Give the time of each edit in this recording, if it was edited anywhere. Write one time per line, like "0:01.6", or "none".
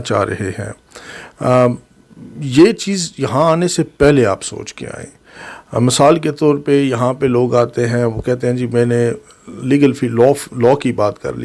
none